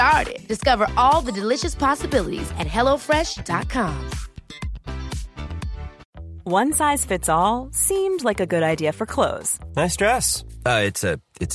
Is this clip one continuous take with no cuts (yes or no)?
no